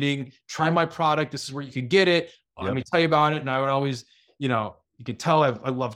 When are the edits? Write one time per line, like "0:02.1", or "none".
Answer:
none